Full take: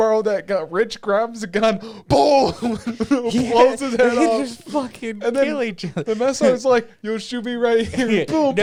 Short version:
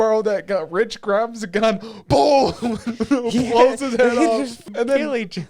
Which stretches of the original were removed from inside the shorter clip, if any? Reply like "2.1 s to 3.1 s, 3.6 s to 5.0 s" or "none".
4.6 s to 5.1 s

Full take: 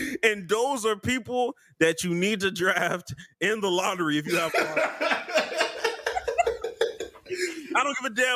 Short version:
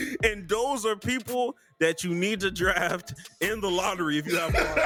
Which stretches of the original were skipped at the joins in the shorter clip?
none

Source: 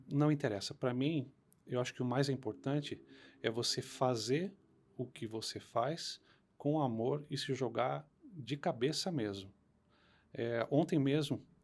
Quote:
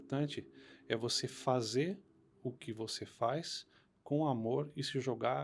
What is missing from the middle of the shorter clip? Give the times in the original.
none

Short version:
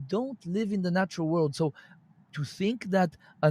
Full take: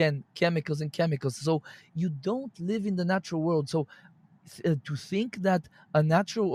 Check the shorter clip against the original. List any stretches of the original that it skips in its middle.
4.5 s to 4.9 s

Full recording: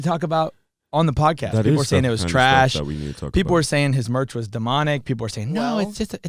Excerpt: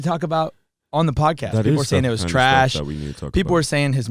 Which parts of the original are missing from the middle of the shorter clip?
none

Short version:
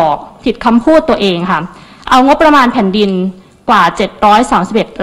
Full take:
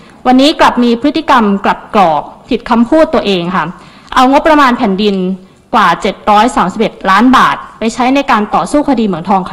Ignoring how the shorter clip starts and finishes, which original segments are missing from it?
none

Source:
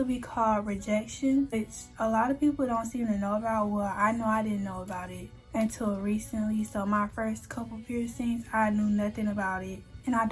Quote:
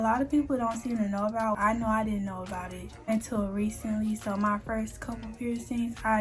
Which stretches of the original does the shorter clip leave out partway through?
3.7 s to 4.0 s, 5.3 s to 5.4 s

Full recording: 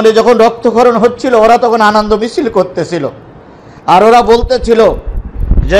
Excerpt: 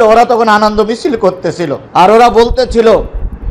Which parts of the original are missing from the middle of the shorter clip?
3.1 s to 3.7 s

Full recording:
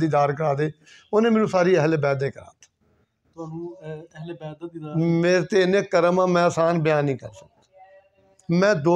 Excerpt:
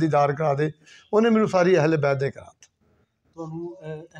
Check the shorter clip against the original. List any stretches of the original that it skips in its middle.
none

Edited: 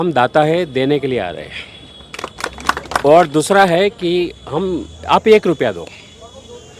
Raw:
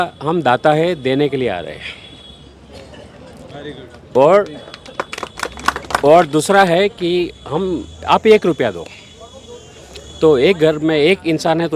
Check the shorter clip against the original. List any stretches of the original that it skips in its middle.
2.5 s to 5.2 s

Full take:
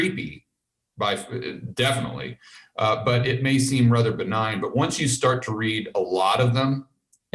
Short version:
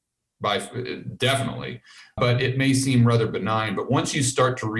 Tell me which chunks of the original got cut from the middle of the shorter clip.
2.7 s to 3.0 s

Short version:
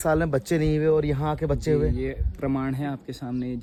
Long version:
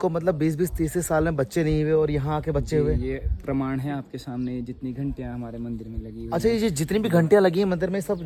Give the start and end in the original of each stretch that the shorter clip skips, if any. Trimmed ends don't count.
none

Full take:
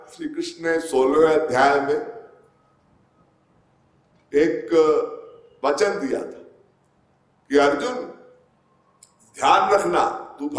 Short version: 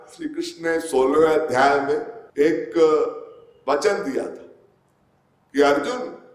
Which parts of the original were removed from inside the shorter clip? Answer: 2.2 s to 4.1 s

